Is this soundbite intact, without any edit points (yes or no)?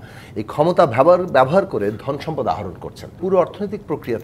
no